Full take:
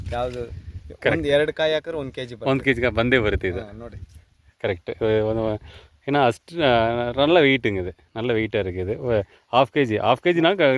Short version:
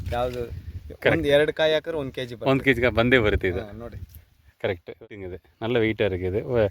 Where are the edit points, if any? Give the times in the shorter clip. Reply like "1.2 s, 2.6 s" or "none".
5.0 s